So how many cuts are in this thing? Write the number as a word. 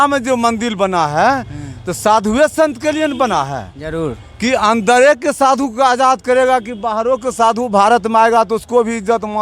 zero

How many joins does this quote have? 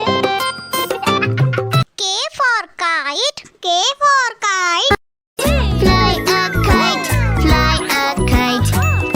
two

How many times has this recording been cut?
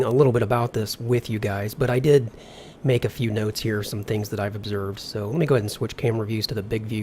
one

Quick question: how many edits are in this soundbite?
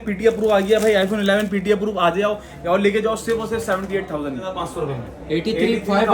one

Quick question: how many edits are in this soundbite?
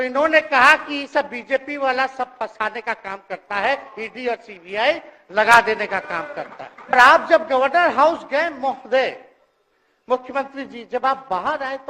one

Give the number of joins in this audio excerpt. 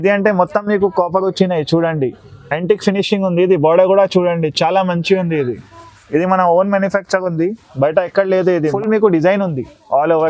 one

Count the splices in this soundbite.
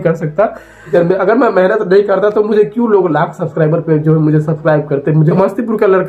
two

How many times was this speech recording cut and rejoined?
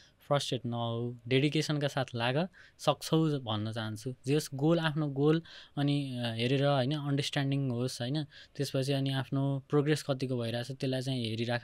zero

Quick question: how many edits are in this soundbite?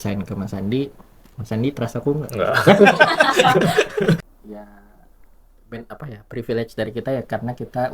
one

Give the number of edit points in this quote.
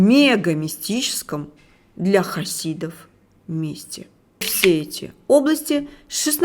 one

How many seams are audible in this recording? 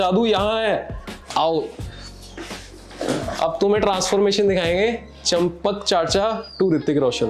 zero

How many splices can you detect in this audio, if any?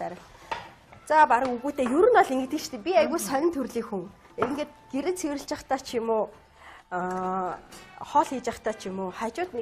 one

